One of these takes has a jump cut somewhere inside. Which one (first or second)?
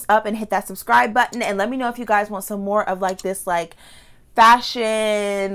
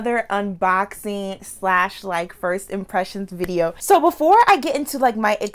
second